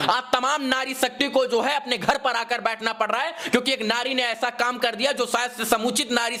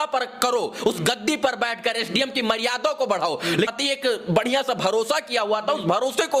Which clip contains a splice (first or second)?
second